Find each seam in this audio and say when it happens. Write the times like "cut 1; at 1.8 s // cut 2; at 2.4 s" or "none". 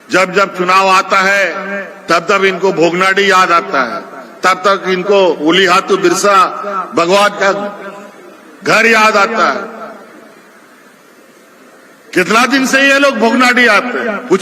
none

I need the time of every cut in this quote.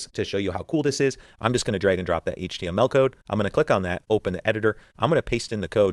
none

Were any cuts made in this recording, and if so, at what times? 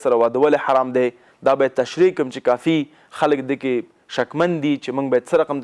none

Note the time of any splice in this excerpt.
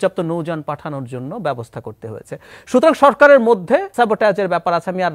cut 1; at 3.9 s

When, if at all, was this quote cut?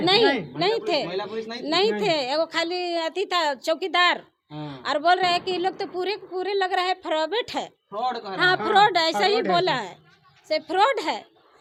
none

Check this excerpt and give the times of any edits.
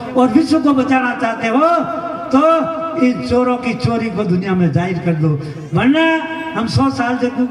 none

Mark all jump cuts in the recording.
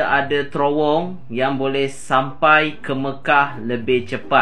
none

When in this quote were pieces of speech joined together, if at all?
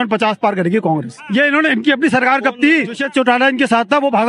cut 1; at 1.2 s // cut 2; at 3.0 s

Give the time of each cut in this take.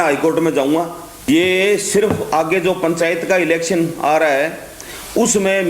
cut 1; at 1.3 s

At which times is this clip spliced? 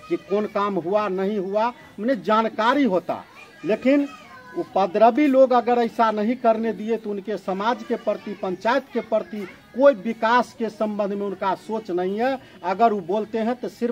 none

